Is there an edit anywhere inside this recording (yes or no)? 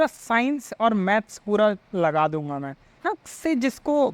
yes